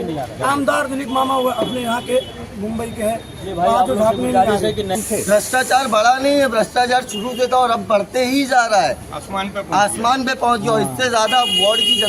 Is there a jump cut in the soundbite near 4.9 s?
yes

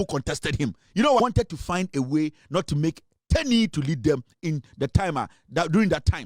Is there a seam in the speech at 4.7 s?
no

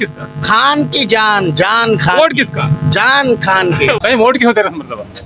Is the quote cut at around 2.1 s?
no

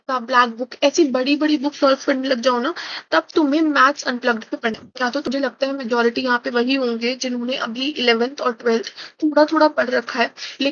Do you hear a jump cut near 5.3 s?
yes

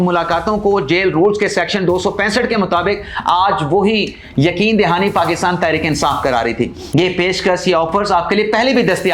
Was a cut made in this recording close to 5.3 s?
no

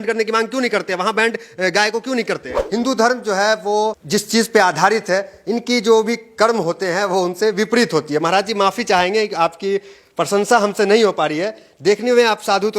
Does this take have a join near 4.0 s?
yes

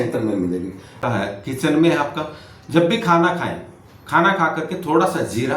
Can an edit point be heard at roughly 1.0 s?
yes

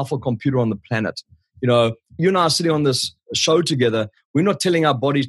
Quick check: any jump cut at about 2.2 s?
yes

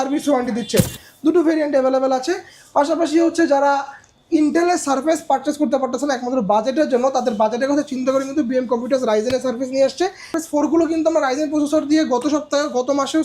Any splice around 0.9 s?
yes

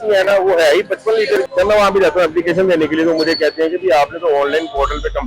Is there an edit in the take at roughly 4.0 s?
no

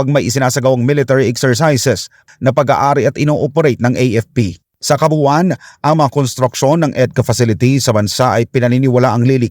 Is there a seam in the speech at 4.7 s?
yes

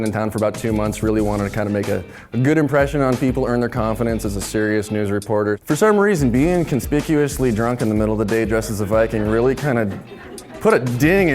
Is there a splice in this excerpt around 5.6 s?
yes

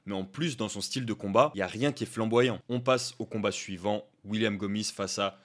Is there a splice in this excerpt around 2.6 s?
yes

